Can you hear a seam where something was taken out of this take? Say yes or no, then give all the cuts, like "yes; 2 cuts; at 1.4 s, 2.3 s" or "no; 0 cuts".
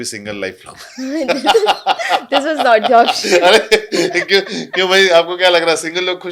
no; 0 cuts